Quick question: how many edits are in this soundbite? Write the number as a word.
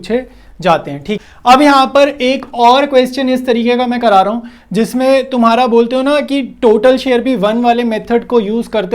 one